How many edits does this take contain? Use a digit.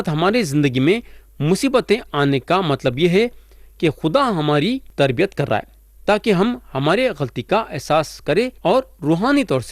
2